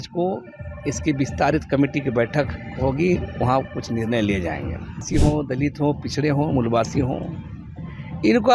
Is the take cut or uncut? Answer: cut